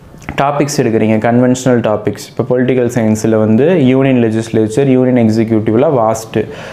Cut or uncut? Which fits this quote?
uncut